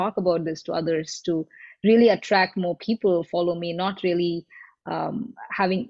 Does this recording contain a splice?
no; 0 cuts

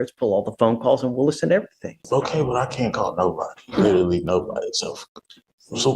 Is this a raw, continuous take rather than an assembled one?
no; 1 cut; at 2.0 s

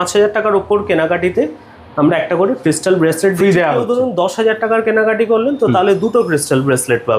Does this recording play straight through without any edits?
yes; 0 cuts

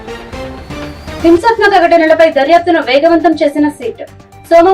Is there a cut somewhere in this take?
yes; 1 cut; at 1.2 s

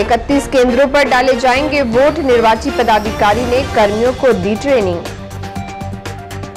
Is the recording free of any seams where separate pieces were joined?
yes; 0 cuts

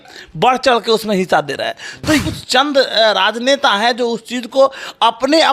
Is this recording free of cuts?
no; 1 cut; at 2.3 s

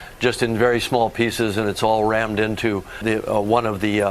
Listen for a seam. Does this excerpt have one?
yes; 1 cut; at 3.0 s

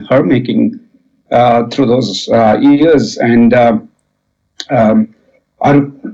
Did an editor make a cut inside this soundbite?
no; 0 cuts

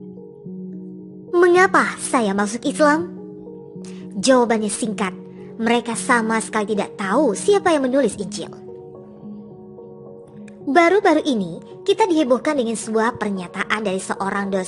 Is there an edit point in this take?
yes; 1 cut; at 1.3 s

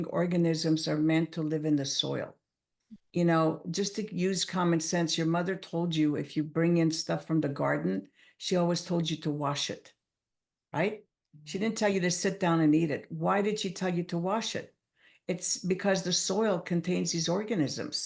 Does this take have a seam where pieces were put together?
no; 0 cuts

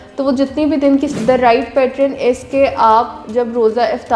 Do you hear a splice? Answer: yes; 1 cut; at 1.1 s

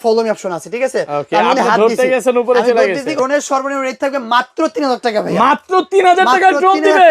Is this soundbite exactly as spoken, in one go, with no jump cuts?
no; 1 cut; at 3.2 s

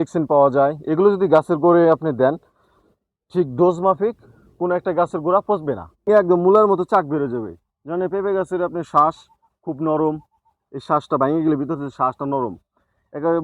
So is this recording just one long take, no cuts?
no; 1 cut; at 6.1 s

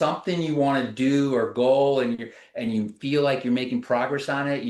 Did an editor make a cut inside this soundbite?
no; 0 cuts

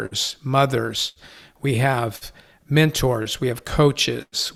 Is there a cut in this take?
no; 0 cuts

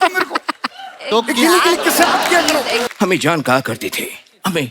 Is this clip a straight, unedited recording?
no; 1 cut; at 2.9 s

